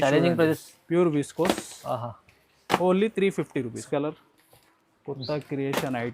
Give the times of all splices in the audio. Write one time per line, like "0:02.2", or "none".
0:03.8